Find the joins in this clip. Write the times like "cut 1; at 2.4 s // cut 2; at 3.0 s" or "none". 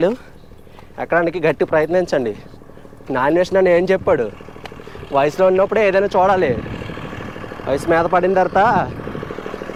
none